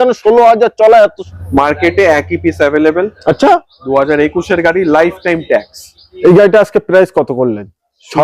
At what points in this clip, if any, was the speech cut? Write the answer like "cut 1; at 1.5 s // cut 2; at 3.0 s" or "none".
cut 1; at 1.2 s // cut 2; at 6.0 s